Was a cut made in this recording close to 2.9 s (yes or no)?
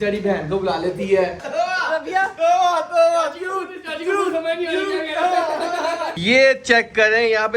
no